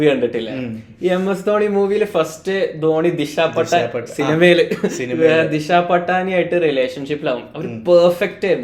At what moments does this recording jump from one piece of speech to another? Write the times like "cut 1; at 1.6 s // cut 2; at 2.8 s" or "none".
none